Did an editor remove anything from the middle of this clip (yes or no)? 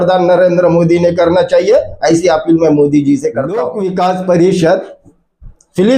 yes